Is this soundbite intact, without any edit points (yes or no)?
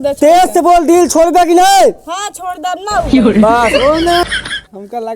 no